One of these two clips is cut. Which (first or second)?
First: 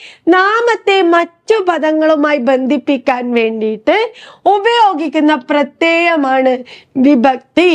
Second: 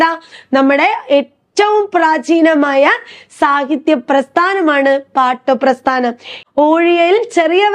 second